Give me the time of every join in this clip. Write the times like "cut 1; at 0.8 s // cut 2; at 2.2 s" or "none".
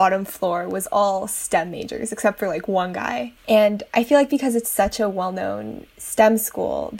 cut 1; at 3.3 s